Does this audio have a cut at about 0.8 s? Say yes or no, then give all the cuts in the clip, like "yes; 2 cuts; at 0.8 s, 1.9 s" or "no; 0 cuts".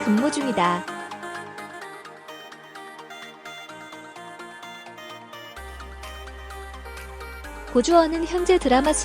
yes; 2 cuts; at 0.8 s, 7.6 s